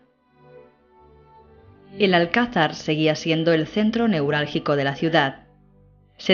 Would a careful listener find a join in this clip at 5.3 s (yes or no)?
no